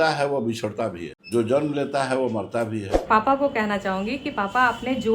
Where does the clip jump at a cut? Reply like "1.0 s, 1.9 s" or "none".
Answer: 1.1 s, 2.9 s